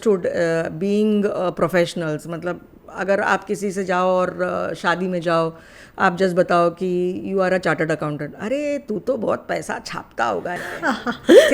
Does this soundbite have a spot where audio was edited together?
no; 0 cuts

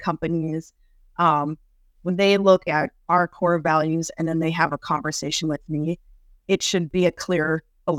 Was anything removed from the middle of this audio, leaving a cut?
yes; 1 cut; at 6.9 s

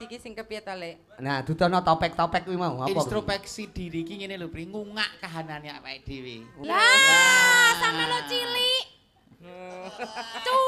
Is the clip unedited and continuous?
no; 1 cut; at 6.6 s

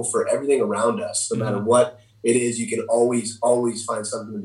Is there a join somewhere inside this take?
no; 0 cuts

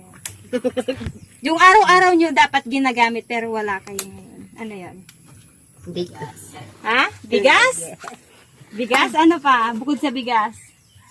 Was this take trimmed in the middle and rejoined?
no; 0 cuts

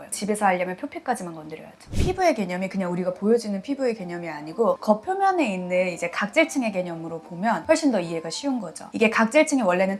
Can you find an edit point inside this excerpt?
yes; 3 cuts; at 1.9 s, 4.8 s, 7.6 s

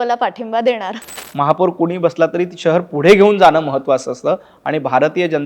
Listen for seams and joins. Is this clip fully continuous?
no; 1 cut; at 1.1 s

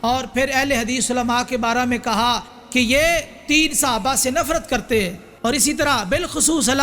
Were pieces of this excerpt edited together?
yes; 1 cut; at 5.2 s

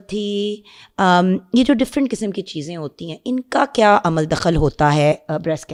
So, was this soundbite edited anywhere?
no; 0 cuts

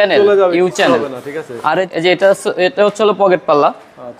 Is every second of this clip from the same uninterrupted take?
no; 1 cut; at 1.9 s

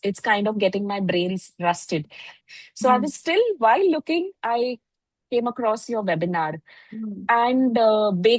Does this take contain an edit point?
no; 0 cuts

